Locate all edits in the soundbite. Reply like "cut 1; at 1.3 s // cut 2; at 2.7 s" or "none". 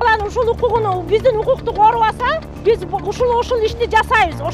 cut 1; at 2.5 s